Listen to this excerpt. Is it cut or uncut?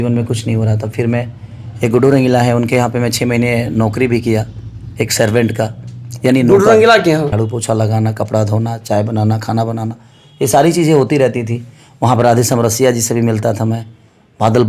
cut